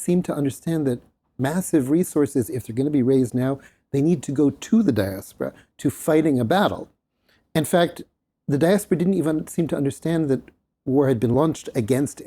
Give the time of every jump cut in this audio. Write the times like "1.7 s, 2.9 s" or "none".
11.3 s